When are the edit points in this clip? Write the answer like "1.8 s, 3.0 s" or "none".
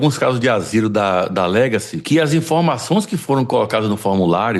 none